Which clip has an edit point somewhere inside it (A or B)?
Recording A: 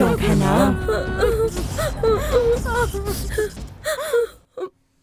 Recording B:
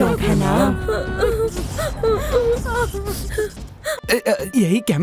B